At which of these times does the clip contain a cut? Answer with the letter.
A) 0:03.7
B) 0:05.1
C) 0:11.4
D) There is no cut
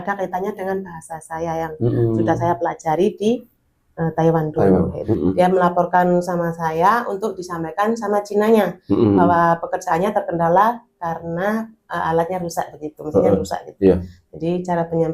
B